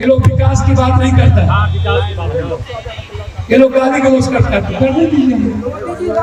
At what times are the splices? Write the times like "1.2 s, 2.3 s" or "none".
none